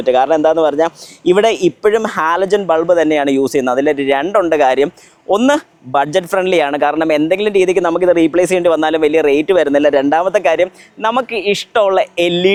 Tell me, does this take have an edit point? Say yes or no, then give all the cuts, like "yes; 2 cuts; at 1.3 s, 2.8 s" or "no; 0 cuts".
no; 0 cuts